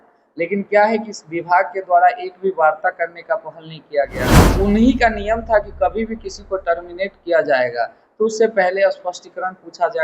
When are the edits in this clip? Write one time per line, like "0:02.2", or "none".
0:04.4